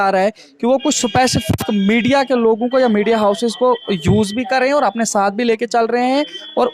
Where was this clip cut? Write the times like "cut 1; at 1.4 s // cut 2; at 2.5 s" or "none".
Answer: none